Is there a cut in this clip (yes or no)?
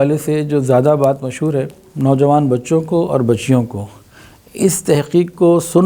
yes